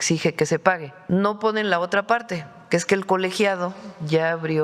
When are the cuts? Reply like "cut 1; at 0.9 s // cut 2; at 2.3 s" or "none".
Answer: cut 1; at 0.9 s